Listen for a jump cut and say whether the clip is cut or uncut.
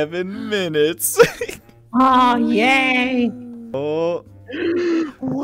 cut